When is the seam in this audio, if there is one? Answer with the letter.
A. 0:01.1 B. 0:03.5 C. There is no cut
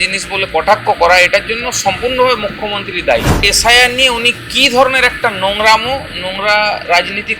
B